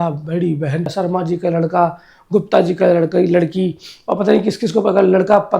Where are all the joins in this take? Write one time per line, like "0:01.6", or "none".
0:00.9